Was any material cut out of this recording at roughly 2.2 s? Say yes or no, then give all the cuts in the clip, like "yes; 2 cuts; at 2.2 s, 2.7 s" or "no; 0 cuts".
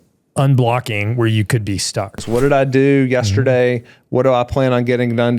yes; 1 cut; at 2.2 s